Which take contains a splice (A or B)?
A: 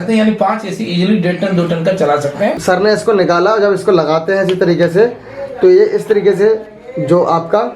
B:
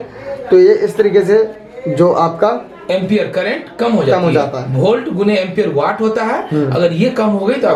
A